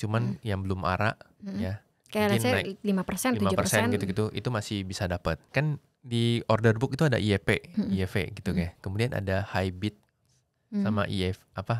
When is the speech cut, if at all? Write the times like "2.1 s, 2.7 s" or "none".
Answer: 5.4 s